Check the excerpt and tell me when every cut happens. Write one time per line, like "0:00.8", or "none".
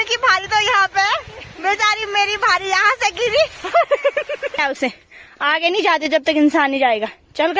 0:04.6